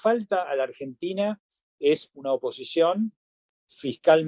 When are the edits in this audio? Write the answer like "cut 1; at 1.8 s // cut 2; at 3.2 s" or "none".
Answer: none